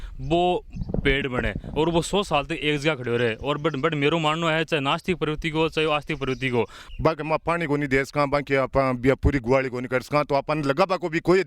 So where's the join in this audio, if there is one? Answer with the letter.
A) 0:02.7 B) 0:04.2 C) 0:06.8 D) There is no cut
C